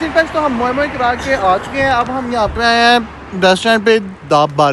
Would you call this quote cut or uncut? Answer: uncut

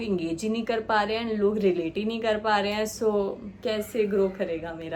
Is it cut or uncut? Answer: uncut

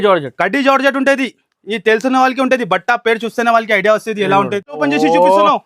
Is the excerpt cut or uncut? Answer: cut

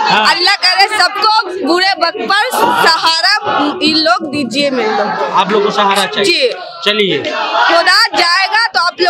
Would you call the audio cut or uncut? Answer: uncut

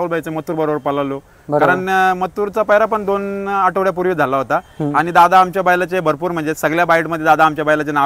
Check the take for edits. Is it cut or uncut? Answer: uncut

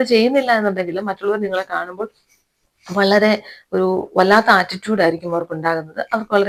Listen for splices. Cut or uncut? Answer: uncut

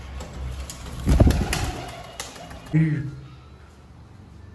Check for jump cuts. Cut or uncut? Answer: cut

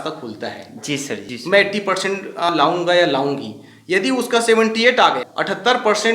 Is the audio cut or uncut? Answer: cut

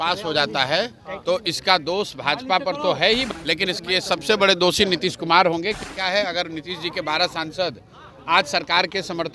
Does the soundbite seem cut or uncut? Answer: cut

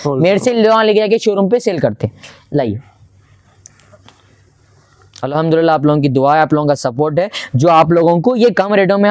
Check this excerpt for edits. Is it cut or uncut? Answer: uncut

